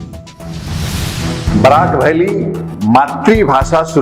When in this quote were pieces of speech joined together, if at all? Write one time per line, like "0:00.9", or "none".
none